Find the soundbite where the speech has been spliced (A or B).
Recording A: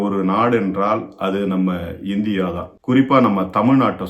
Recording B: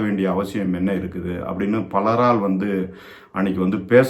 A